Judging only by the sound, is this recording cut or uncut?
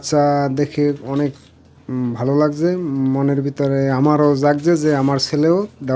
uncut